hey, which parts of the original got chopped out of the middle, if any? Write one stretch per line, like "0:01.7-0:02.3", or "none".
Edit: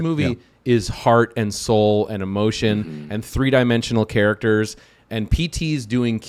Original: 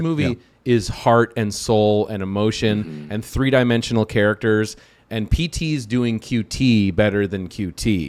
none